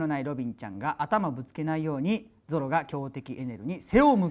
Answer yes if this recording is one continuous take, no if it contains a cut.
yes